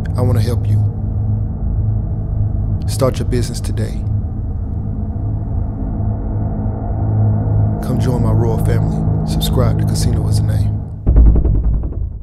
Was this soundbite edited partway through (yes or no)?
no